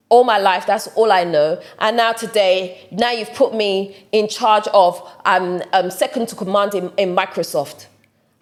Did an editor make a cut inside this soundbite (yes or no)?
no